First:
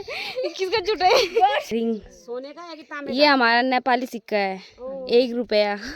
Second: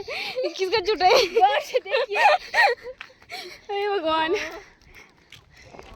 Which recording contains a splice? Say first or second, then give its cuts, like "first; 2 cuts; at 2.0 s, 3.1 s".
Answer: first; 1 cut; at 1.7 s